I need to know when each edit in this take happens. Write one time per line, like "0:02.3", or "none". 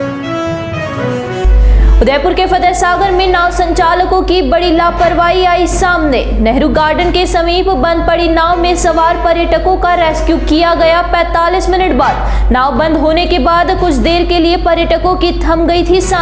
none